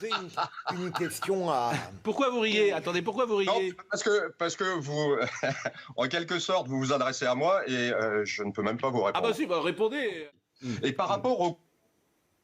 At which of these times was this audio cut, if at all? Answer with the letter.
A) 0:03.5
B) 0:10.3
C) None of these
B